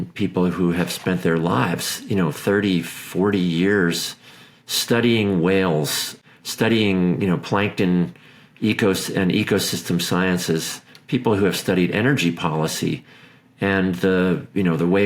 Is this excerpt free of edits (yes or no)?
yes